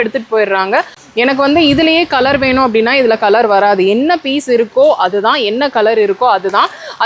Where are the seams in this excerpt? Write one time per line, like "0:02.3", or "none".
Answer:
0:01.0